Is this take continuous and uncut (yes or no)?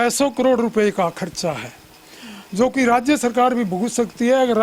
yes